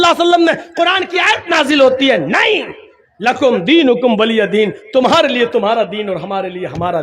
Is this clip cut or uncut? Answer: uncut